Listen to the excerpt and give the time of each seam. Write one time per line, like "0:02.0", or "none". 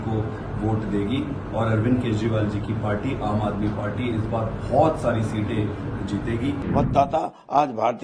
0:06.6